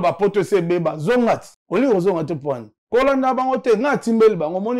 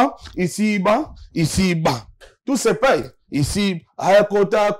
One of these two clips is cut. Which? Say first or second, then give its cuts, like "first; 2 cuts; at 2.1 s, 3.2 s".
first; 2 cuts; at 1.5 s, 2.7 s